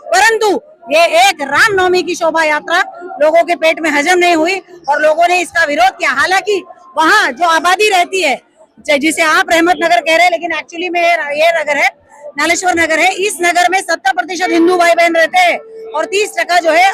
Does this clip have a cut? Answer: no; 0 cuts

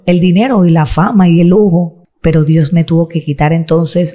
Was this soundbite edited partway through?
yes; 1 cut; at 2.1 s

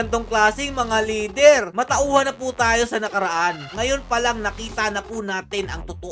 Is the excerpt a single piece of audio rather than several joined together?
no; 2 cuts; at 1.7 s, 3.6 s

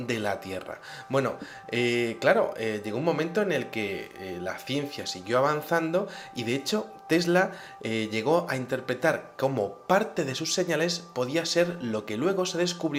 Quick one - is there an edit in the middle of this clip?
no; 0 cuts

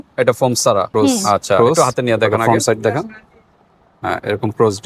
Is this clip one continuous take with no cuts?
no; 1 cut; at 2.5 s

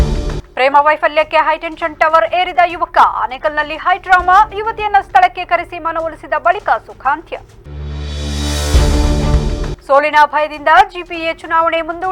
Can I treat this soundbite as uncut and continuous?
yes; 0 cuts

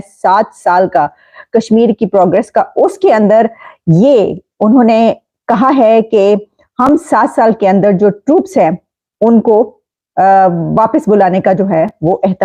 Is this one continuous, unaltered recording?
yes; 0 cuts

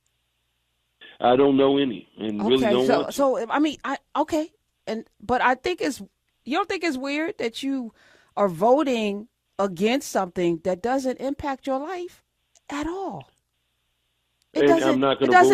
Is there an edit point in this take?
no; 0 cuts

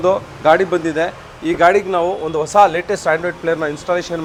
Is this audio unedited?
yes; 0 cuts

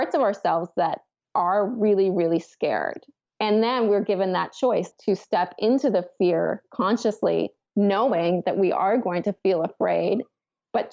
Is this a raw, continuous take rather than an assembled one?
no; 1 cut; at 4.9 s

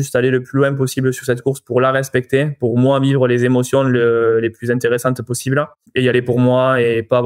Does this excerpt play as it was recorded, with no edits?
no; 1 cut; at 5.8 s

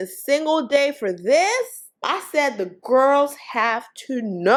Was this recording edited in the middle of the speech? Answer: no; 0 cuts

